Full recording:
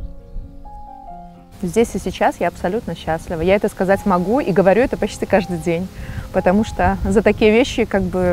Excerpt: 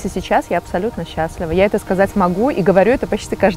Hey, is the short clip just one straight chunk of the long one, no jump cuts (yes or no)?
yes